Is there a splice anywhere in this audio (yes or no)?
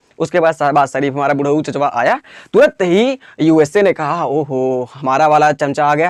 no